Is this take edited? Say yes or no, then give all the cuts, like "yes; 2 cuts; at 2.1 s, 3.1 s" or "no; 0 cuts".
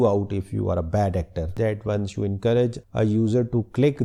no; 0 cuts